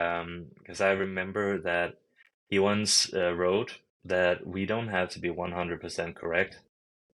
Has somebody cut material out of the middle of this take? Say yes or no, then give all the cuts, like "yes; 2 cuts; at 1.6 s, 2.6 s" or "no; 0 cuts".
no; 0 cuts